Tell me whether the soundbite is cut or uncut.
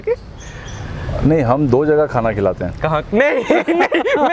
uncut